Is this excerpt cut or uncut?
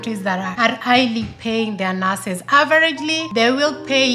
uncut